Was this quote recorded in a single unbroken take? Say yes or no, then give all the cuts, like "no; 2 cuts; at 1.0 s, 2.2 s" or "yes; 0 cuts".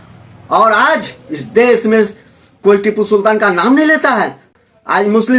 no; 1 cut; at 4.4 s